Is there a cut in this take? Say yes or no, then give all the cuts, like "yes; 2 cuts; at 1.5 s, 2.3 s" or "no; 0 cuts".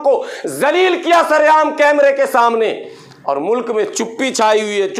no; 0 cuts